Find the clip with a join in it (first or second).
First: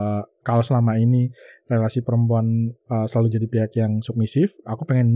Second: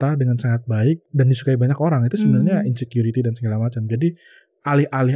second